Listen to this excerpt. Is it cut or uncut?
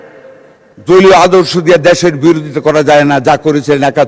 uncut